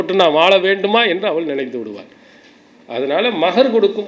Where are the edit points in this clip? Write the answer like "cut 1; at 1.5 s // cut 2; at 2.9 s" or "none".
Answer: none